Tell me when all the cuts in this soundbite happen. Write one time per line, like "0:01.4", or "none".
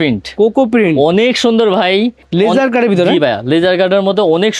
0:02.2